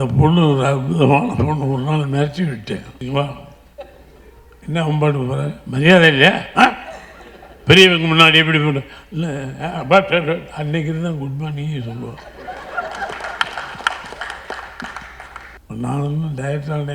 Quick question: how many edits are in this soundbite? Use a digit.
2